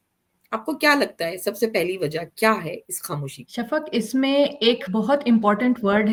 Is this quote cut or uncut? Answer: uncut